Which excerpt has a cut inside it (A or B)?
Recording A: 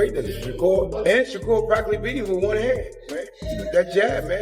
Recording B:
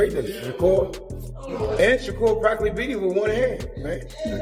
A